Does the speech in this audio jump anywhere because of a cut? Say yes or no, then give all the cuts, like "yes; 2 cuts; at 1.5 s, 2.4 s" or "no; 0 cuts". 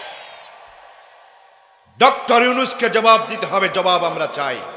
no; 0 cuts